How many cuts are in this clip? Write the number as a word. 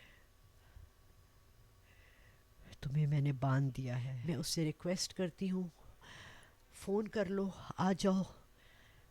one